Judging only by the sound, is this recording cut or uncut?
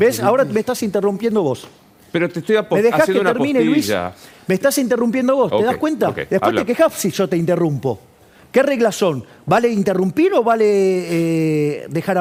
uncut